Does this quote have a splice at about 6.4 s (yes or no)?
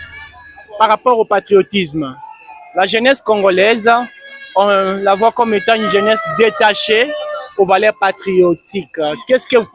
no